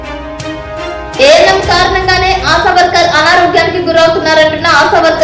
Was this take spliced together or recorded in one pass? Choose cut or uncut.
cut